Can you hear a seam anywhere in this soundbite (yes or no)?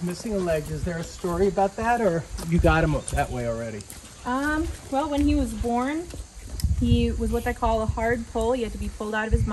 no